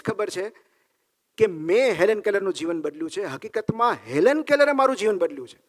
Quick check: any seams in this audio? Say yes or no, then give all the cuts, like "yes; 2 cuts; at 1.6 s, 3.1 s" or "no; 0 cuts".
no; 0 cuts